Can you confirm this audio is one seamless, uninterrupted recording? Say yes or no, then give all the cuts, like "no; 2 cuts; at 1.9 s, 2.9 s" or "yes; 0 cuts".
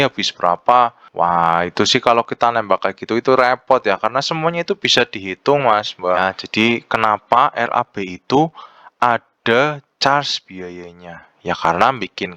no; 2 cuts; at 1.0 s, 6.2 s